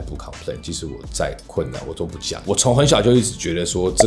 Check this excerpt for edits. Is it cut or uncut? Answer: cut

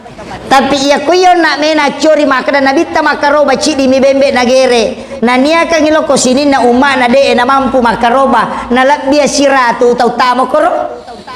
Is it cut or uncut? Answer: uncut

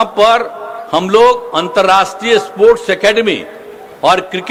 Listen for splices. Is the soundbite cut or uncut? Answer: uncut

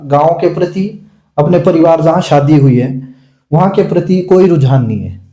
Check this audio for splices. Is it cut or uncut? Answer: uncut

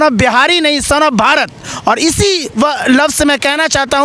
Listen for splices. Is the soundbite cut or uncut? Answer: uncut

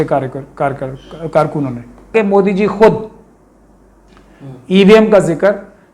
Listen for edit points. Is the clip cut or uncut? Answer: cut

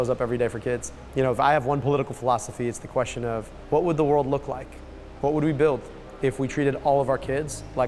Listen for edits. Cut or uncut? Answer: cut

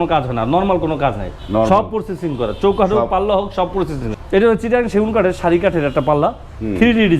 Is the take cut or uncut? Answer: cut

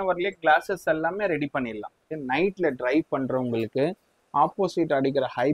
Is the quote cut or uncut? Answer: cut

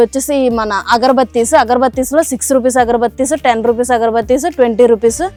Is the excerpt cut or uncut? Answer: uncut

